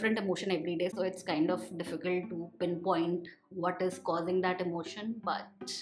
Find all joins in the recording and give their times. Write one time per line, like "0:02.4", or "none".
none